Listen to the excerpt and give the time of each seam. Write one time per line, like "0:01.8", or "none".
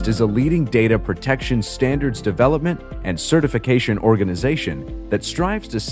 none